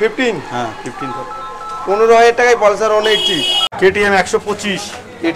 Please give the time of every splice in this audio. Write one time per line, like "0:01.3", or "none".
0:03.6

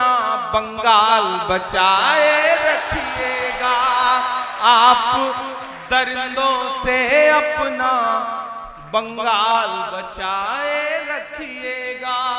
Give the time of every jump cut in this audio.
none

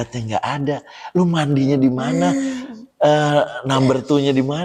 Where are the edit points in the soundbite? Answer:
none

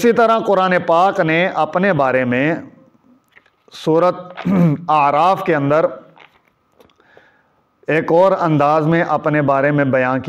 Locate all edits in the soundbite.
none

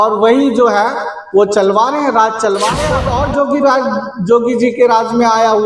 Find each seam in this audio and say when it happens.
0:02.9

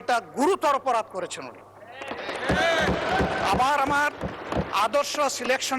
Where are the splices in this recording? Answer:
none

